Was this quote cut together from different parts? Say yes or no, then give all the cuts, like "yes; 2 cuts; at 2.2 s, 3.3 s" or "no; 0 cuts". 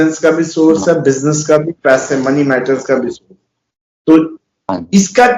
no; 0 cuts